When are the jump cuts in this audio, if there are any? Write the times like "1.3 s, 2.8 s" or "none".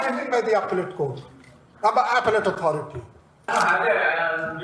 3.5 s